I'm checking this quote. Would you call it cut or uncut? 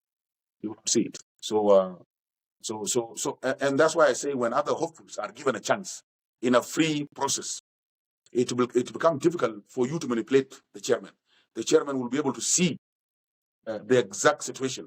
uncut